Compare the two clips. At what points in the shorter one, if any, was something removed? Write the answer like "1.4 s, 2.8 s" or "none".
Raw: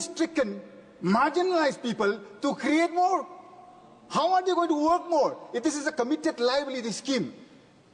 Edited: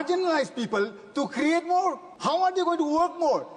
2.1 s